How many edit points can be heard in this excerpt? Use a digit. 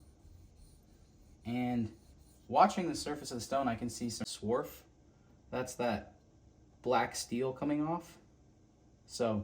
1